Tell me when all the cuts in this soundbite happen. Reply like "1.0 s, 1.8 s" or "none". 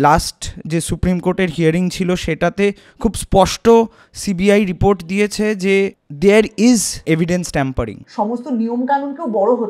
6.0 s, 7.0 s, 8.0 s